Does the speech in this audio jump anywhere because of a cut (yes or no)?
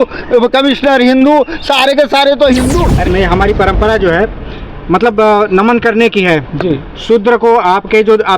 yes